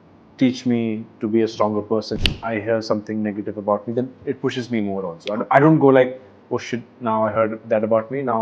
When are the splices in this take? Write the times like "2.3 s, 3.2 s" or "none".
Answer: 2.1 s